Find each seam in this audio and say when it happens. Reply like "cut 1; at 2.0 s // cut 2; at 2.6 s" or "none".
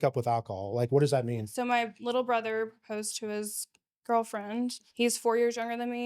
cut 1; at 1.5 s // cut 2; at 4.8 s